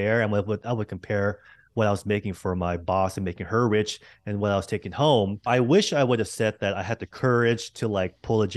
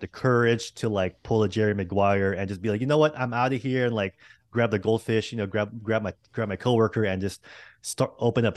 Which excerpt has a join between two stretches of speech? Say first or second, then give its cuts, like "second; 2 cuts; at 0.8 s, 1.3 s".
first; 1 cut; at 5.5 s